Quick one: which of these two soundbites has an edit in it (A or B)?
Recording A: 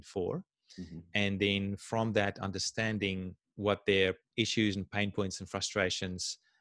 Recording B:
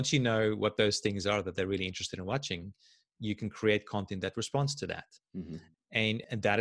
A